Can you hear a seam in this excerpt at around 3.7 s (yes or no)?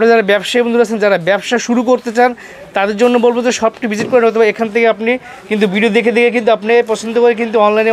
no